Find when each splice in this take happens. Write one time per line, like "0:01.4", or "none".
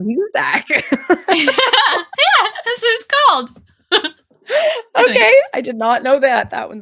none